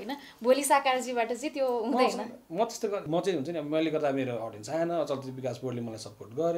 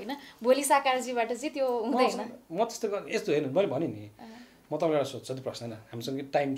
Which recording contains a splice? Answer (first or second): first